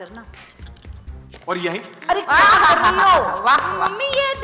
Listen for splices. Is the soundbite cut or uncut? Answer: cut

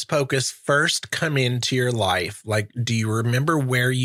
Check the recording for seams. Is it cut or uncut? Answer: uncut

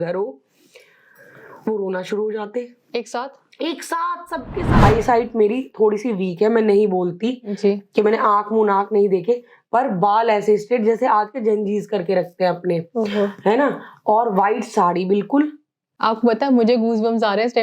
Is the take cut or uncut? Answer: cut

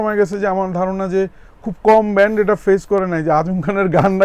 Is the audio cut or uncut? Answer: uncut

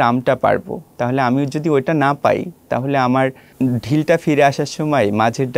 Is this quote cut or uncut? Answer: cut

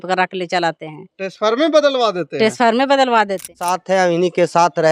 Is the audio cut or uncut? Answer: cut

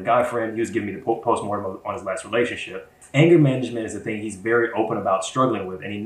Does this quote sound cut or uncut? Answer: cut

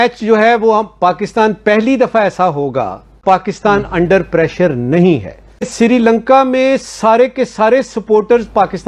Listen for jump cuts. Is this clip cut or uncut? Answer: cut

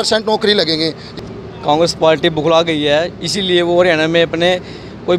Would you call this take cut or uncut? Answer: cut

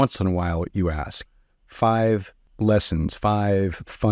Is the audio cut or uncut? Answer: cut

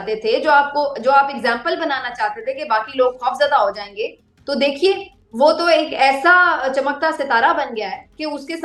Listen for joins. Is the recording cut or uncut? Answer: uncut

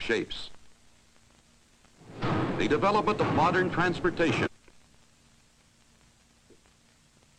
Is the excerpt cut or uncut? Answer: uncut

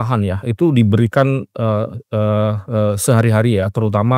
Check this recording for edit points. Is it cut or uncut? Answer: uncut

